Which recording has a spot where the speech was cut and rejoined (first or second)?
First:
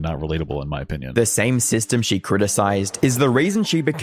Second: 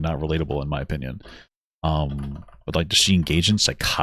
first